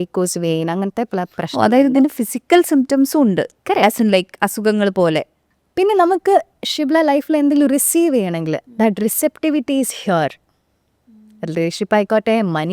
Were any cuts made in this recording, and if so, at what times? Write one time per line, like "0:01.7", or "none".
0:05.4